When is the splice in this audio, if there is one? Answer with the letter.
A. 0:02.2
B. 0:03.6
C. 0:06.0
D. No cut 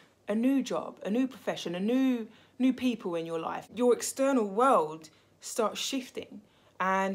B